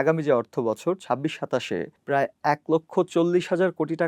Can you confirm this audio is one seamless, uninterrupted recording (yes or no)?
no